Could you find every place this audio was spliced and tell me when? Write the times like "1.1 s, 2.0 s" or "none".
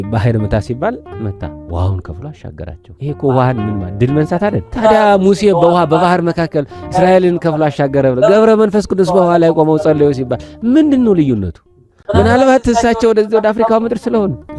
none